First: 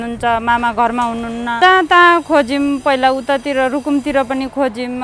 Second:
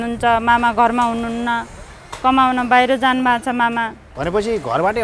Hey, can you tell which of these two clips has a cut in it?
first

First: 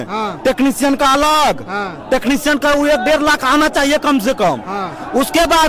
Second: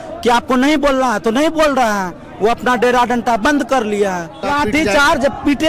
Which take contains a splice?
second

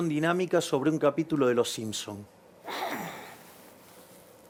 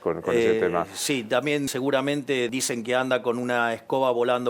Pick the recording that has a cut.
second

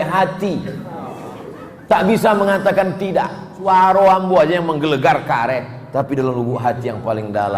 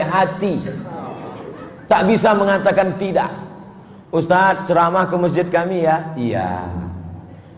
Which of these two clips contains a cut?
first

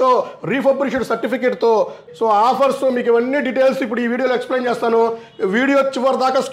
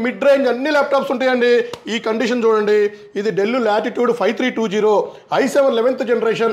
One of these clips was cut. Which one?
first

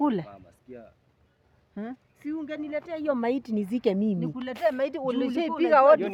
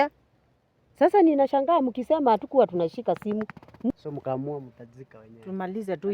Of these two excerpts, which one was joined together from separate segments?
second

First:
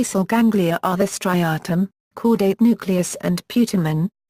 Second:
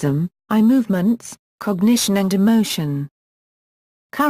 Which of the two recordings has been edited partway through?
second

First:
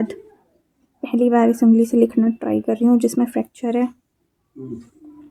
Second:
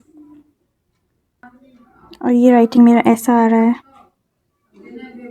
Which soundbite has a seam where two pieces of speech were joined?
second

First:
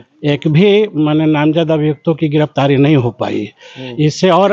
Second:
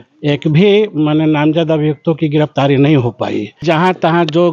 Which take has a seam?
second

